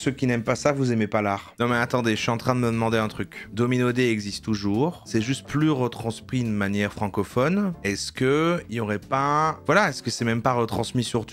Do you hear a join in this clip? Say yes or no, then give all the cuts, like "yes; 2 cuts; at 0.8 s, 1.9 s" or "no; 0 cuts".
yes; 2 cuts; at 1.5 s, 9.6 s